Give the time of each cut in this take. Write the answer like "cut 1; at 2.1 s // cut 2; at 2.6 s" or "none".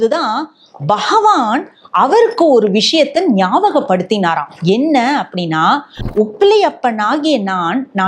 cut 1; at 6.0 s